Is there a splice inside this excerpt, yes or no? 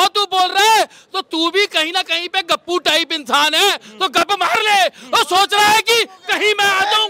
no